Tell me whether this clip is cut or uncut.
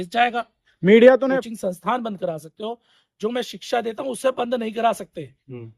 cut